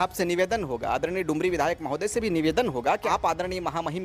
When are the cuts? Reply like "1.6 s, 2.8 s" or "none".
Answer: 3.0 s

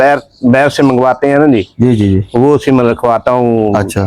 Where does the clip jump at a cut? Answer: none

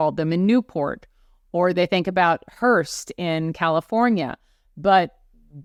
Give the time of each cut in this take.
none

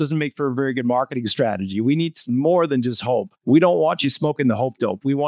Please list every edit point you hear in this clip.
3.3 s

